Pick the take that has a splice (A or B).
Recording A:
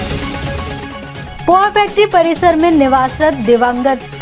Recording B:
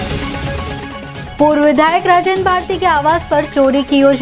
B